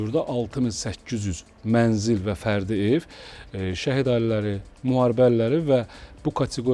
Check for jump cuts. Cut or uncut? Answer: uncut